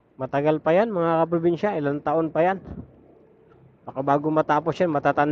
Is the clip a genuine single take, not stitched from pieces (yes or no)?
yes